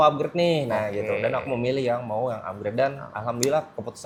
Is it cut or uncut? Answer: uncut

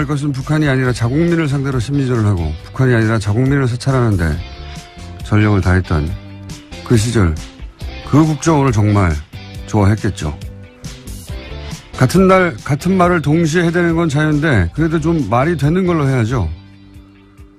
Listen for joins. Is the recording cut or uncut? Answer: cut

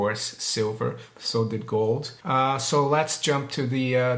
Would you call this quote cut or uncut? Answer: cut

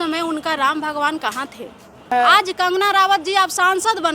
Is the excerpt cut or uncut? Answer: cut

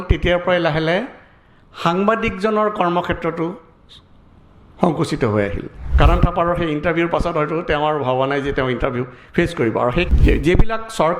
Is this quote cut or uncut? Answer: cut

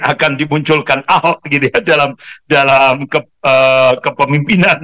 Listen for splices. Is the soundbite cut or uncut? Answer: uncut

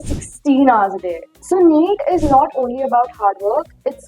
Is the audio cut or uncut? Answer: cut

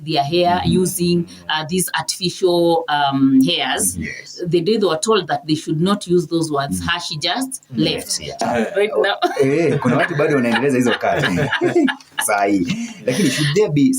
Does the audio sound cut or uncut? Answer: cut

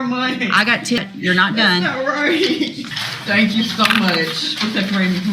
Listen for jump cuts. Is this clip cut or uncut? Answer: cut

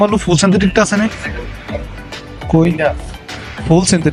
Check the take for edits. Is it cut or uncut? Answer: uncut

